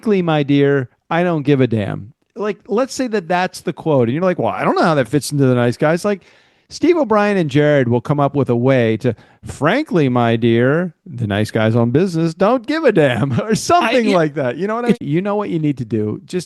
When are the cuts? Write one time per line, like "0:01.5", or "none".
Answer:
0:15.0